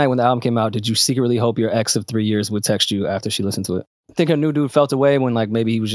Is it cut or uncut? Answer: cut